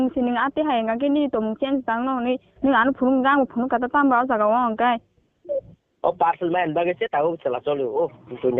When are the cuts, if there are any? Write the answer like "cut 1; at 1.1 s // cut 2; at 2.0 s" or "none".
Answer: none